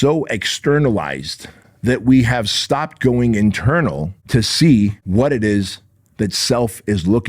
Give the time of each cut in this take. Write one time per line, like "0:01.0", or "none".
0:04.1
0:05.0